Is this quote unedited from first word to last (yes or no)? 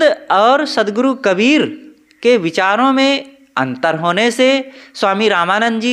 yes